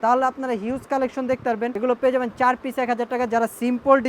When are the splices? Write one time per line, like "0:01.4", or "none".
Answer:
0:01.7